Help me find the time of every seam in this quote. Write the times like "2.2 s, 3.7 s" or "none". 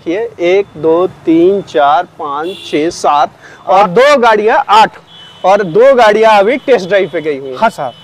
none